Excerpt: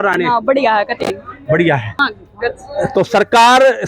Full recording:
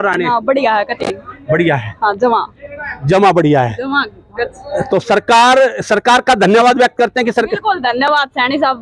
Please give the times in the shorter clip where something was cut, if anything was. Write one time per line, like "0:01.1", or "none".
0:02.0